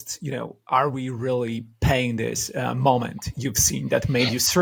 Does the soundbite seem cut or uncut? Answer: uncut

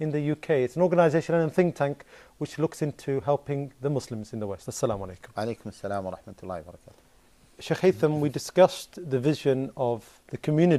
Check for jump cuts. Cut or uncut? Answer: uncut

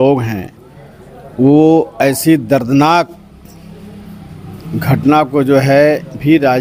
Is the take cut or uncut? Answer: uncut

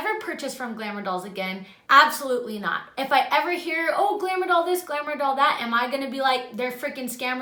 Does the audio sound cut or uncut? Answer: uncut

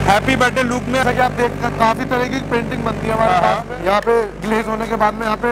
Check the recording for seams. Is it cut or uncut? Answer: cut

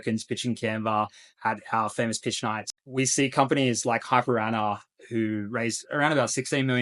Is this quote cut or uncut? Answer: cut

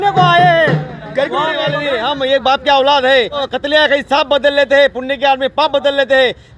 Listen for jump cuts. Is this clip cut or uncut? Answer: cut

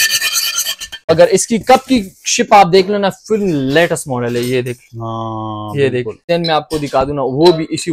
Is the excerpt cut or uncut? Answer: cut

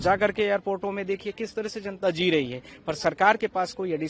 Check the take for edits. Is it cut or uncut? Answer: uncut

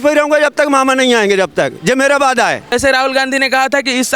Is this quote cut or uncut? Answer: cut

